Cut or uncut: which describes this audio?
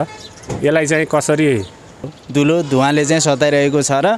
cut